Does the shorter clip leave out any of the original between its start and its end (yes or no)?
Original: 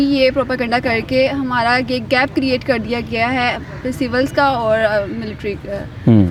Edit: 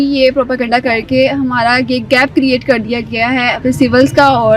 yes